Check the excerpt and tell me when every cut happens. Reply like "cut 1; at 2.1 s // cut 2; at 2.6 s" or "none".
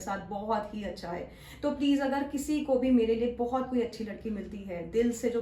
none